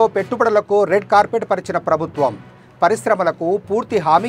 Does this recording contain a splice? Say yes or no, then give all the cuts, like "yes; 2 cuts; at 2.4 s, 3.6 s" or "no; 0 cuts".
no; 0 cuts